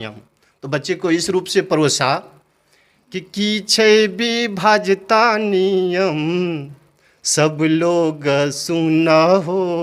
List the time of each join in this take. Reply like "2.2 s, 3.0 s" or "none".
none

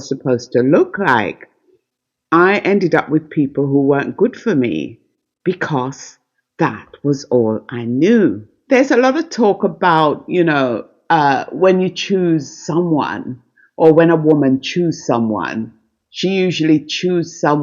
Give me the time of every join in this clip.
8.5 s

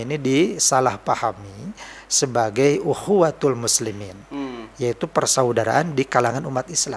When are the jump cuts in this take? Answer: none

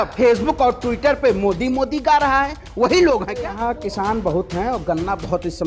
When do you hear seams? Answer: 3.5 s

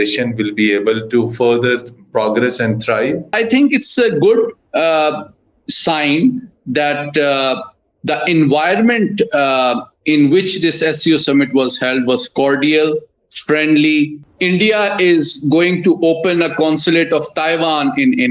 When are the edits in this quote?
3.3 s, 14.3 s

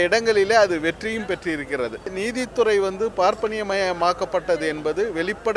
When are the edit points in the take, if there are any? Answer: 2.2 s

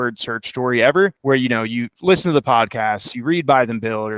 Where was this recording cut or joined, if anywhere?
1.5 s

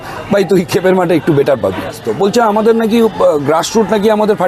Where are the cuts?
2.0 s

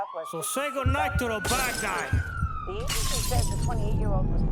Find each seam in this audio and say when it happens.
none

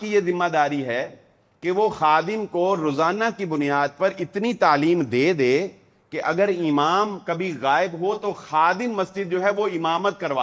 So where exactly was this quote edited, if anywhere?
none

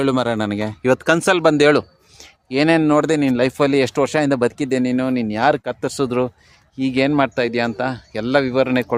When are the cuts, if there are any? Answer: none

